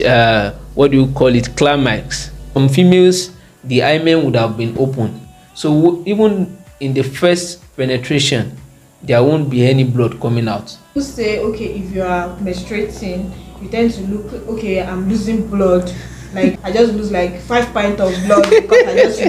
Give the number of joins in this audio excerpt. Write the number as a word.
three